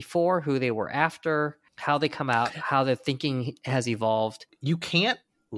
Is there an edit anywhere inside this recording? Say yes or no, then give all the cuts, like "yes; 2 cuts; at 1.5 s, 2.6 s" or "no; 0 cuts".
yes; 2 cuts; at 1.7 s, 4.5 s